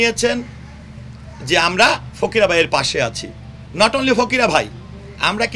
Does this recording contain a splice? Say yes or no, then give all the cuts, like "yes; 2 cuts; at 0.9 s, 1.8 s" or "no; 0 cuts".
no; 0 cuts